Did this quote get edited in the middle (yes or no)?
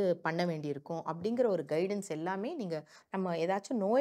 yes